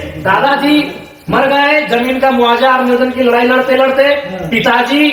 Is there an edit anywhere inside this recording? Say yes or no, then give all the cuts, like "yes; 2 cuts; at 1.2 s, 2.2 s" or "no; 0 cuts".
no; 0 cuts